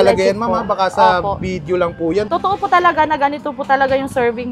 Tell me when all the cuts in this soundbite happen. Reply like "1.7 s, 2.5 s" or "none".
2.3 s

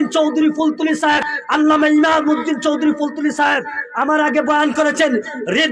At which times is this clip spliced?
1.3 s

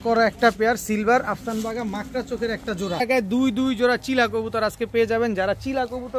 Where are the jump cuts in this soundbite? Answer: 3.0 s

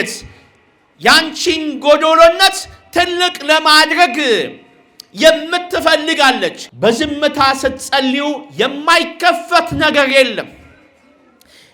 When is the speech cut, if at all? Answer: 6.6 s

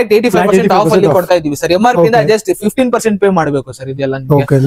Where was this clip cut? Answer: none

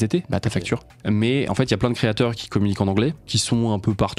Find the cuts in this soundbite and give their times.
0.9 s, 3.3 s

